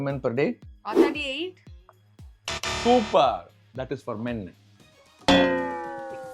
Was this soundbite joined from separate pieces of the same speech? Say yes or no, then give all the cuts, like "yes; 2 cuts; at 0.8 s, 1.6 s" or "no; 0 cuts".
yes; 1 cut; at 5.1 s